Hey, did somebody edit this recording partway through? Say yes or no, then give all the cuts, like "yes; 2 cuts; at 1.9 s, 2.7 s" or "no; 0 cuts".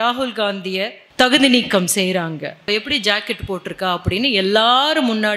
yes; 2 cuts; at 1.0 s, 2.6 s